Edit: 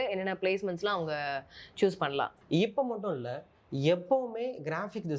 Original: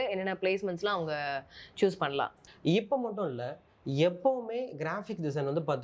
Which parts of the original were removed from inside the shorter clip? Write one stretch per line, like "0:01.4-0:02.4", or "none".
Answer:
0:02.4-0:02.5